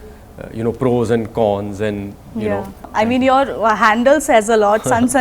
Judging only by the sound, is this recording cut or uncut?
cut